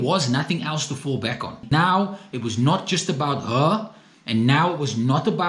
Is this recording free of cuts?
no; 1 cut; at 1.6 s

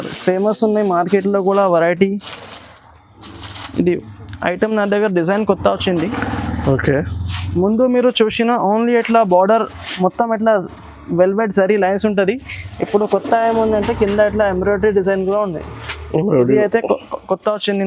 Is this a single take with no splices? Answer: yes; 0 cuts

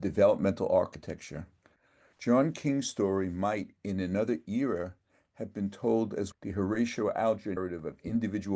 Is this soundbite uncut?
no; 2 cuts; at 6.3 s, 7.6 s

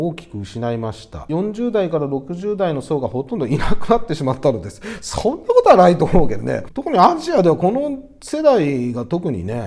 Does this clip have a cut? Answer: no; 0 cuts

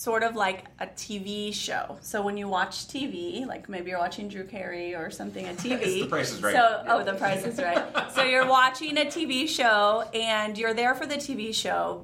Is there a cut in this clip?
no; 0 cuts

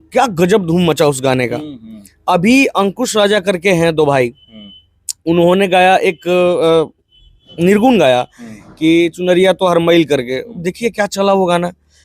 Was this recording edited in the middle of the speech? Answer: no; 0 cuts

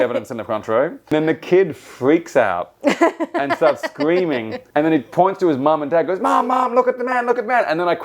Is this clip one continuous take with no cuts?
no; 2 cuts; at 1.1 s, 4.6 s

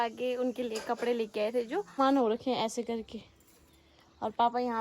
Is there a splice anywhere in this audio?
yes; 1 cut; at 2.0 s

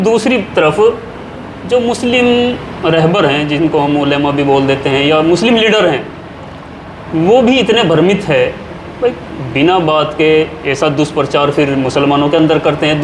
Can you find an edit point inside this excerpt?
no; 0 cuts

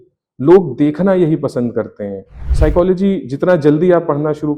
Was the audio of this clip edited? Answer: yes; 1 cut; at 2.4 s

